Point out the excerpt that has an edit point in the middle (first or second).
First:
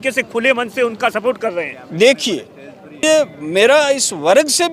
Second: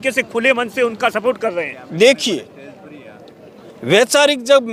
first